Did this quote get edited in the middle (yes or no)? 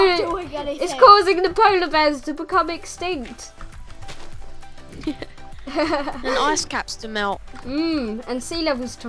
no